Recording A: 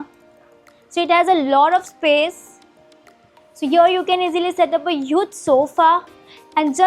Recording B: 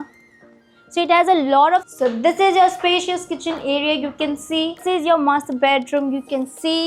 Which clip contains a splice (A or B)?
B